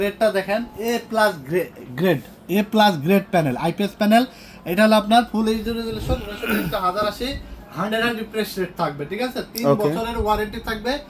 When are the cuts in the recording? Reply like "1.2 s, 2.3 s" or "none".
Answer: none